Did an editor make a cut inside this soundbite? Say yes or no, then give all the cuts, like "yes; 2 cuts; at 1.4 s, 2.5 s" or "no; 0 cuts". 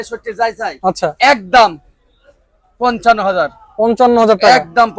no; 0 cuts